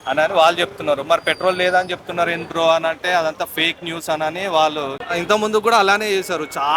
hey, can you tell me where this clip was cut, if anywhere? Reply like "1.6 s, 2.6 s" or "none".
5.0 s